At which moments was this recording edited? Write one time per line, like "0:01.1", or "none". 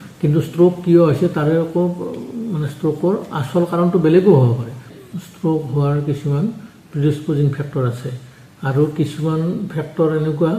0:04.9